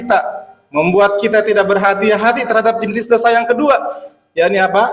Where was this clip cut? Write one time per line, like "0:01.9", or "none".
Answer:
0:02.9